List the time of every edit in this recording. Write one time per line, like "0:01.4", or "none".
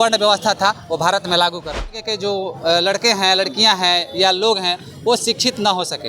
0:02.1